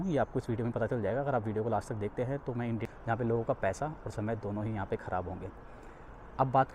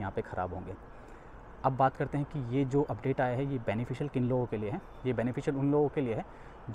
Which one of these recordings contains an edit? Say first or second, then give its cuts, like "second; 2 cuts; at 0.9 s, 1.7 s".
first; 1 cut; at 2.9 s